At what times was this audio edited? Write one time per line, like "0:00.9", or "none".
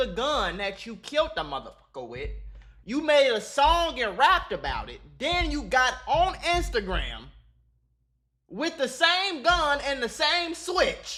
none